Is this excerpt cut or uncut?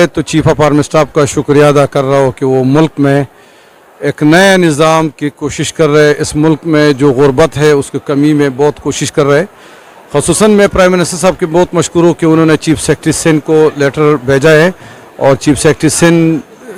uncut